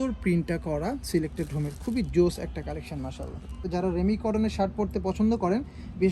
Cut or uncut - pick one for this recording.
cut